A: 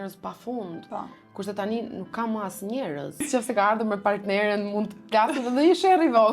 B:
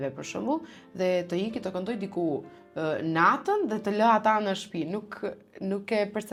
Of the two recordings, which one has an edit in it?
A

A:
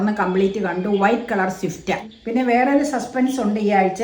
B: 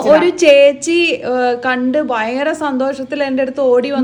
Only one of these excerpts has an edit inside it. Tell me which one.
A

